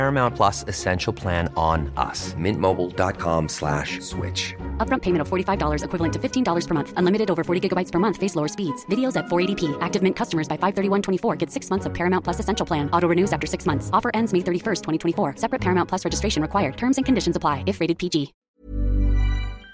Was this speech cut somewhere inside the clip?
yes; 1 cut; at 18.4 s

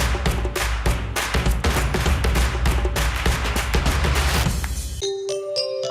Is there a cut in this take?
yes; 1 cut; at 4.8 s

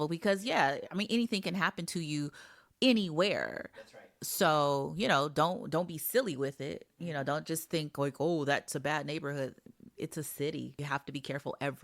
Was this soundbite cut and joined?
yes; 1 cut; at 10.8 s

